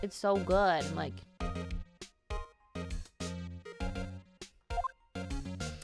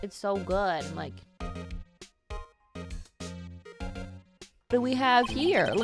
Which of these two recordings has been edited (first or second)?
second